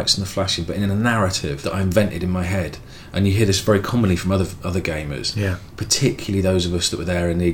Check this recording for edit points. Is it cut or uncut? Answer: cut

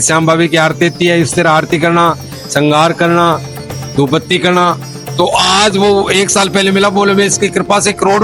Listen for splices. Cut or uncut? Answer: uncut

